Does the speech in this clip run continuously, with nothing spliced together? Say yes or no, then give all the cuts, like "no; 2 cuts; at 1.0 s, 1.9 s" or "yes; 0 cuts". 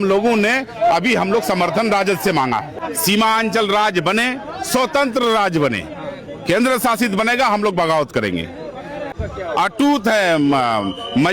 no; 2 cuts; at 2.7 s, 9.1 s